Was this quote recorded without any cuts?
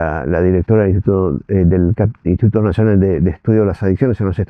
yes; 0 cuts

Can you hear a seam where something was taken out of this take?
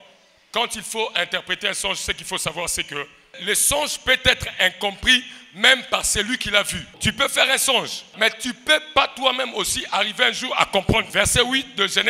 yes; 4 cuts; at 3.4 s, 7.0 s, 8.1 s, 11.1 s

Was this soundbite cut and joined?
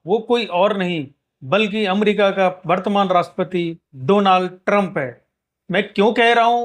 no; 0 cuts

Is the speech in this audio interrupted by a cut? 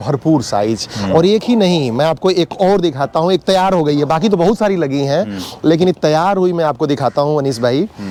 no; 0 cuts

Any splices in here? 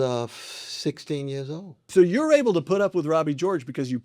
yes; 1 cut; at 1.8 s

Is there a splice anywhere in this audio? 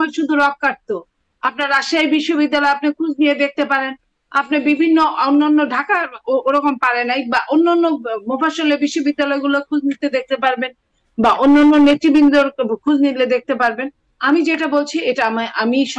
no; 0 cuts

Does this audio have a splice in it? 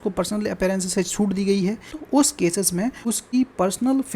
yes; 2 cuts; at 1.9 s, 3.2 s

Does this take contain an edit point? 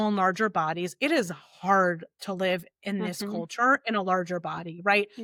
no; 0 cuts

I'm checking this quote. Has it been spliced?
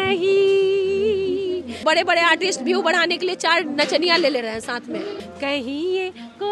yes; 2 cuts; at 1.7 s, 5.2 s

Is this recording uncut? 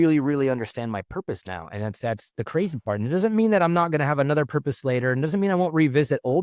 yes; 0 cuts

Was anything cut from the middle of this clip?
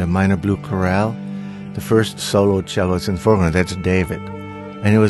no; 0 cuts

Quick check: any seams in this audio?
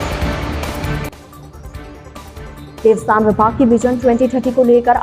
yes; 1 cut; at 2.8 s

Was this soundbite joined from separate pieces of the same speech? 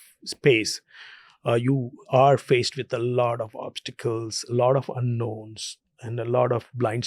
no; 0 cuts

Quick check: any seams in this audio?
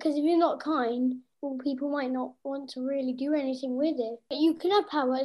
yes; 2 cuts; at 1.3 s, 4.3 s

